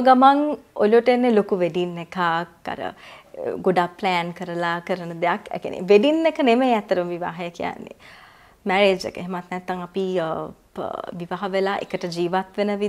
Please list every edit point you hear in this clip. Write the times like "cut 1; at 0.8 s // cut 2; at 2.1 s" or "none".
none